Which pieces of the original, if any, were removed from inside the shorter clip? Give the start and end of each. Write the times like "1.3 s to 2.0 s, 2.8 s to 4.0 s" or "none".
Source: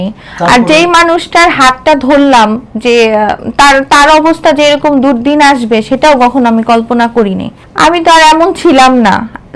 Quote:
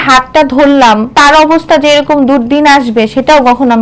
2.6 s to 3.9 s